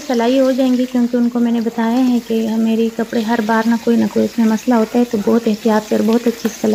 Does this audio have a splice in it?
no; 0 cuts

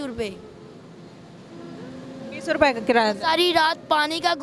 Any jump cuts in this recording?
no; 0 cuts

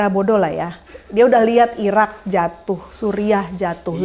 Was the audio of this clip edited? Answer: no; 0 cuts

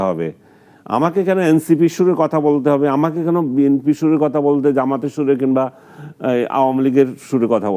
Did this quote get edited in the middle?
no; 0 cuts

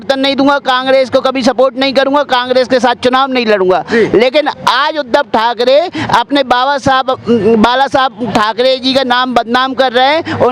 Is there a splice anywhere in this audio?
no; 0 cuts

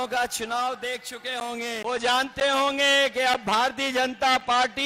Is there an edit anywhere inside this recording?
yes; 1 cut; at 1.8 s

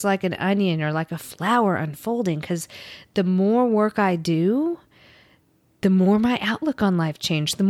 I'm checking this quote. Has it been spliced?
no; 0 cuts

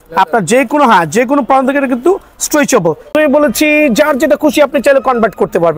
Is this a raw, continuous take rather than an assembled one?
no; 1 cut; at 3.1 s

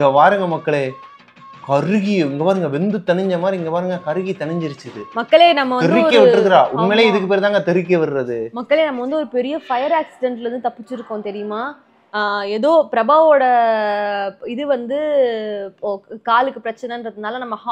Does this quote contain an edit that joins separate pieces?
no; 0 cuts

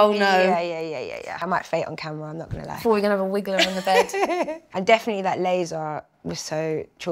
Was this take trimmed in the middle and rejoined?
yes; 2 cuts; at 1.4 s, 4.7 s

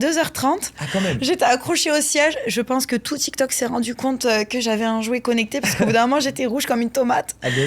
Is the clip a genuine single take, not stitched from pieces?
yes; 0 cuts

